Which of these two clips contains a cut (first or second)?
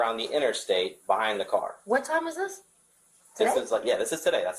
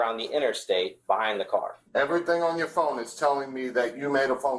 second